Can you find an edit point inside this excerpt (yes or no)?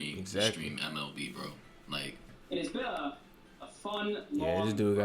yes